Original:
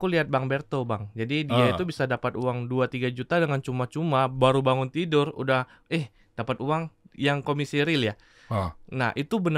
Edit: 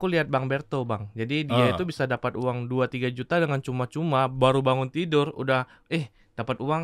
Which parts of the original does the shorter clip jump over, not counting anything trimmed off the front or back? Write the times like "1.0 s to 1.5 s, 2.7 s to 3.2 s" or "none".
none